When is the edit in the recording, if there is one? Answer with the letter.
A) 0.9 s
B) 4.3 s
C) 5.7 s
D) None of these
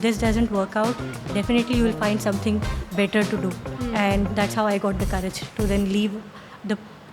B